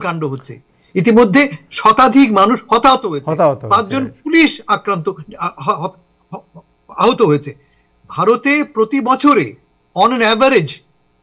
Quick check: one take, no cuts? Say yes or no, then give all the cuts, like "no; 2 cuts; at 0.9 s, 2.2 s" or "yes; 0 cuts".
yes; 0 cuts